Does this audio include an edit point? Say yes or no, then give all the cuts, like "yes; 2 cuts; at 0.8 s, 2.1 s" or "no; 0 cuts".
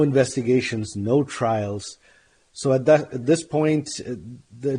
no; 0 cuts